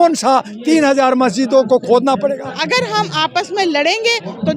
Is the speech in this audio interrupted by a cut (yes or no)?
yes